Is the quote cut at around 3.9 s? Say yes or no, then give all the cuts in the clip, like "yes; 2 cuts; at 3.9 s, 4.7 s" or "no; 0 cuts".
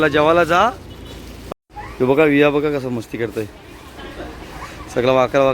no; 1 cut; at 1.3 s